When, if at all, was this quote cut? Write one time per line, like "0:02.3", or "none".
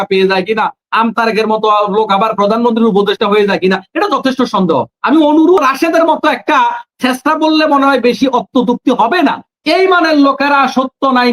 0:05.6